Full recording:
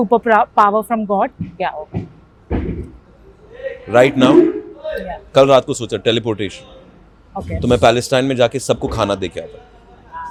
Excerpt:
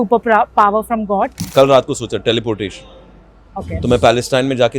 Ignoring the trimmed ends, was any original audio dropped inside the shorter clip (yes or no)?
yes